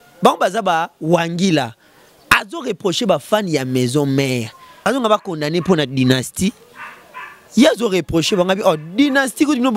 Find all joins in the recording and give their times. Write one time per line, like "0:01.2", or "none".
0:04.9